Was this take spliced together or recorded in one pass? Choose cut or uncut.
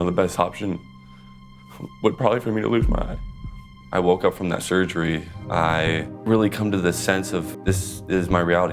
cut